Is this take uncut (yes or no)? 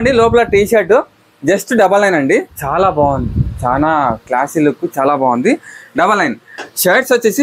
no